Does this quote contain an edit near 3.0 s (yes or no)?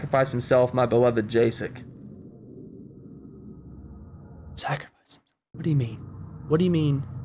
no